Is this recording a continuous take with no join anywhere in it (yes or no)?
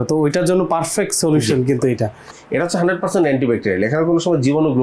no